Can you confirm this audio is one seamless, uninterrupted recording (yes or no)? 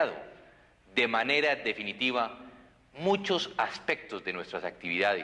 no